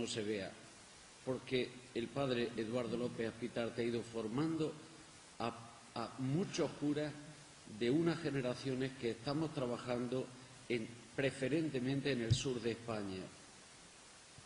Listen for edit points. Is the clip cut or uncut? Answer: cut